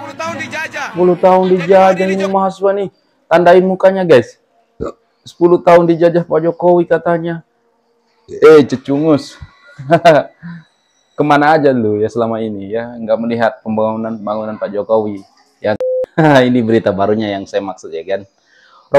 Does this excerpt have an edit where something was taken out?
yes; 2 cuts; at 0.9 s, 15.8 s

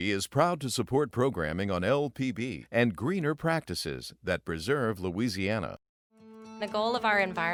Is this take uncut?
yes; 0 cuts

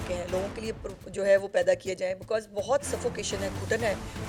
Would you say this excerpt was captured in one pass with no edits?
yes; 0 cuts

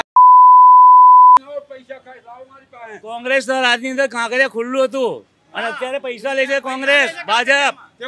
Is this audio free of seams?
no; 1 cut; at 1.4 s

